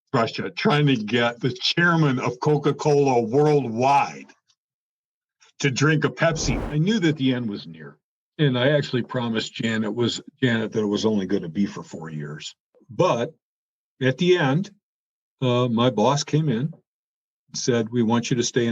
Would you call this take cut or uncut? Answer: cut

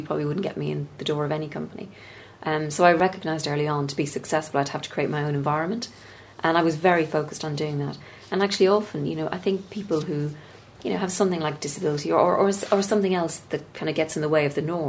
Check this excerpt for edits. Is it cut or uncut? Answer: cut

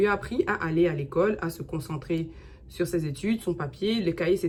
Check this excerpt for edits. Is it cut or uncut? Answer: uncut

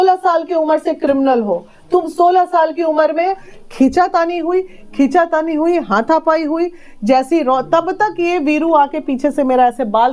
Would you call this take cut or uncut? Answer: cut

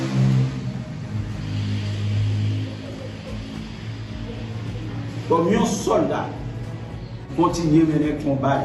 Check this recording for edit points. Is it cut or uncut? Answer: cut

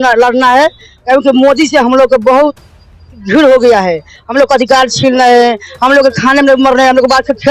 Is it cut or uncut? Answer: uncut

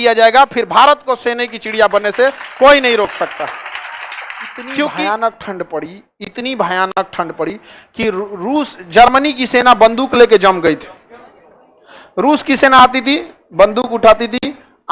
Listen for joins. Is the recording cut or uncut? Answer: cut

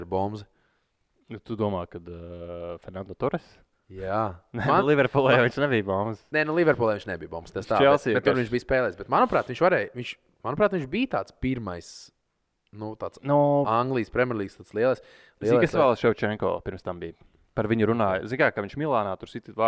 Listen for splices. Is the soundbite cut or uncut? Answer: uncut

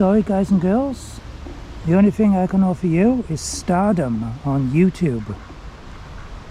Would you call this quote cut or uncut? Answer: uncut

